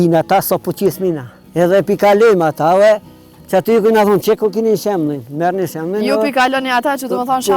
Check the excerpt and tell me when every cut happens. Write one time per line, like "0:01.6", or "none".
0:01.3